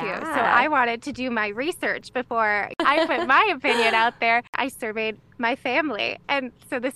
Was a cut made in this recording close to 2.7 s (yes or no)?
yes